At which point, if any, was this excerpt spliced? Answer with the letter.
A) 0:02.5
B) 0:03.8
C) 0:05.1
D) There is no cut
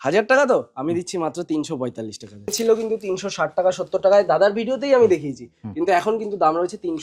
A